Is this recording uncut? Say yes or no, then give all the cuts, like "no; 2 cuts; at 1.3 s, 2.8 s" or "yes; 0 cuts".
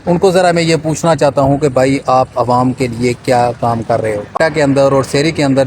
no; 1 cut; at 4.4 s